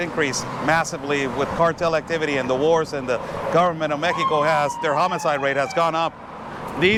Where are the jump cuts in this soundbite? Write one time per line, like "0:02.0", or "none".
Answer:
none